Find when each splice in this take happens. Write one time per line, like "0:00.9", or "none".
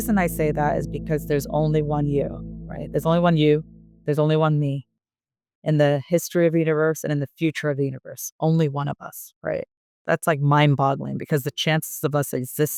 none